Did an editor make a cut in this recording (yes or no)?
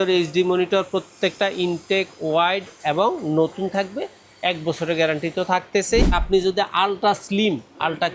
yes